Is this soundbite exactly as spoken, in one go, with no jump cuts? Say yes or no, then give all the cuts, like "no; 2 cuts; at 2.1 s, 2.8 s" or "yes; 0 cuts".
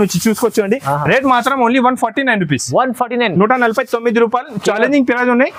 yes; 0 cuts